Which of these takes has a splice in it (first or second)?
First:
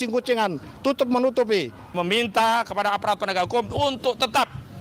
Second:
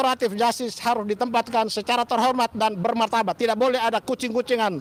first